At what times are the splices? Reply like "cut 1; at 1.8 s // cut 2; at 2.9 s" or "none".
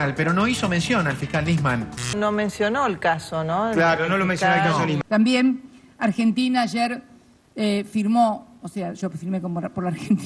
cut 1; at 5.0 s